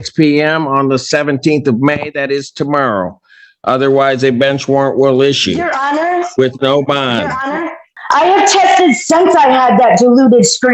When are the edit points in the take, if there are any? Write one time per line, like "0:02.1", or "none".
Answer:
0:07.9